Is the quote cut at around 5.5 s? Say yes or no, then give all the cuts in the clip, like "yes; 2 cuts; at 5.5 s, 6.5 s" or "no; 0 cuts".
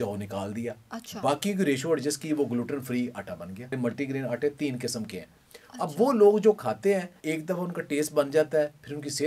no; 2 cuts; at 3.8 s, 7.1 s